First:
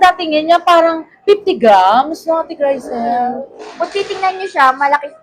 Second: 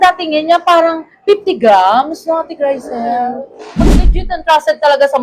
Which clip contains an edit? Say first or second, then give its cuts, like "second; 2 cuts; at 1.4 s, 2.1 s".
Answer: second; 1 cut; at 4.0 s